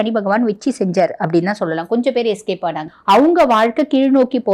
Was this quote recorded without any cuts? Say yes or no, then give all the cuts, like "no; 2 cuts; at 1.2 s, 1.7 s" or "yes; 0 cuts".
no; 1 cut; at 2.9 s